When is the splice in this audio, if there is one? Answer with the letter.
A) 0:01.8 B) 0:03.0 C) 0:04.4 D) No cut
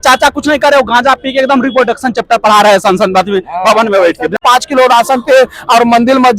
C